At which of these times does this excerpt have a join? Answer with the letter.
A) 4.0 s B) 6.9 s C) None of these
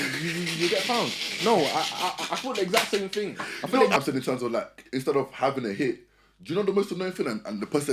A